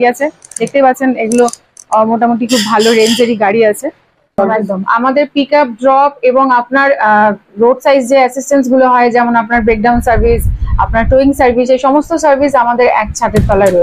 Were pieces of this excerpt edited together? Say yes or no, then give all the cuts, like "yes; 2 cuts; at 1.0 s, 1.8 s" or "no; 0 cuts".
yes; 1 cut; at 4.3 s